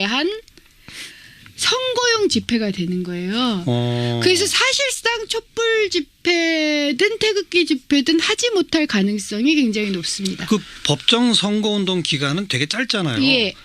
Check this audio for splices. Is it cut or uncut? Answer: cut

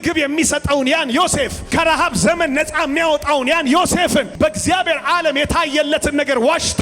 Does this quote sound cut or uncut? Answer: cut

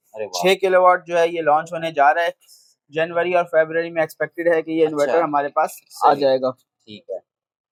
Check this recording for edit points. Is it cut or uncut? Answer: uncut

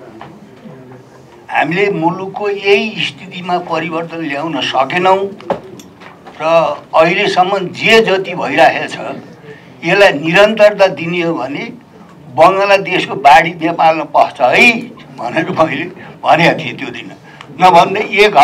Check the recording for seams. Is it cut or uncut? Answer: uncut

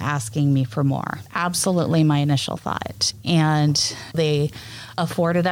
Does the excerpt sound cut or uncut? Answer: cut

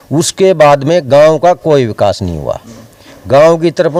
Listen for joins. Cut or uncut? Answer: uncut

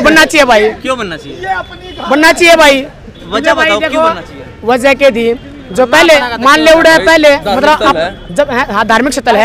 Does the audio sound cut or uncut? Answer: uncut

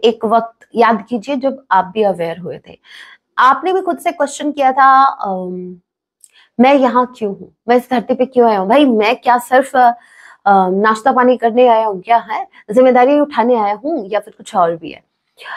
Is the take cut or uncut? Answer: uncut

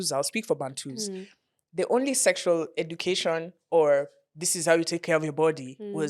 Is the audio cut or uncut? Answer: uncut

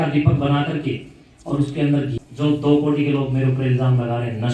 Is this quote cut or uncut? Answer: cut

